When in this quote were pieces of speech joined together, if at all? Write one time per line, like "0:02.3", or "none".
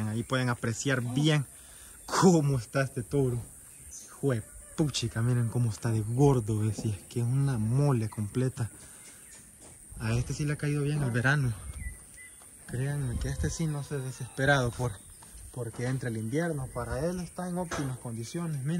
none